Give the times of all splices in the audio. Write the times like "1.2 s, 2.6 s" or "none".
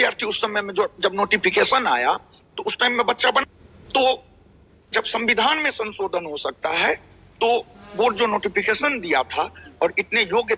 3.4 s